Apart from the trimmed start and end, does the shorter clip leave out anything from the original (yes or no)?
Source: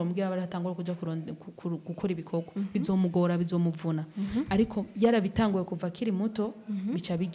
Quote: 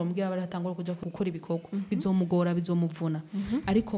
yes